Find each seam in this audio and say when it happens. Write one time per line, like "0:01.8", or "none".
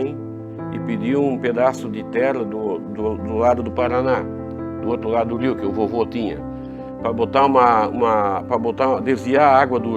none